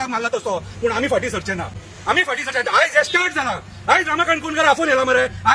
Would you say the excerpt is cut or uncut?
uncut